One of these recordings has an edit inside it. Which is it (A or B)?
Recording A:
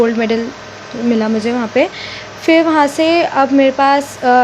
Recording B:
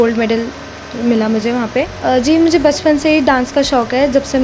B